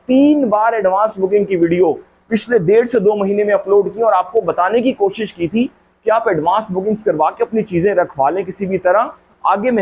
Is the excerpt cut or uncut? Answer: uncut